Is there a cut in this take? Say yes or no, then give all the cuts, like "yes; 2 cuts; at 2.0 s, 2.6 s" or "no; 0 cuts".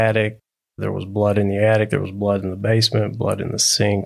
no; 0 cuts